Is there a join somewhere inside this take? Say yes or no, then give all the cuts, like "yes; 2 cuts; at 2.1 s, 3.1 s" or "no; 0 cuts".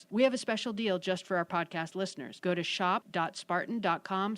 yes; 2 cuts; at 2.3 s, 3.1 s